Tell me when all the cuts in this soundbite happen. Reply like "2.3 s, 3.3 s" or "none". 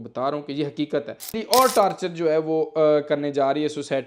1.3 s

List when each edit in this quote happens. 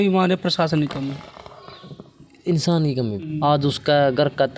3.2 s

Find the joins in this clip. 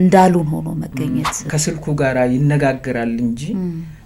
1.5 s

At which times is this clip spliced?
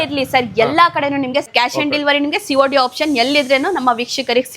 1.5 s

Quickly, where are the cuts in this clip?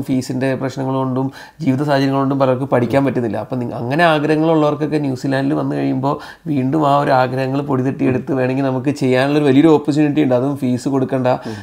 none

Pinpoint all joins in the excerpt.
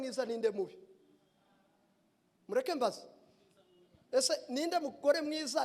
none

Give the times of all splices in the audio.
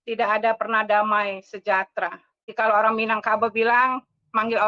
2.5 s

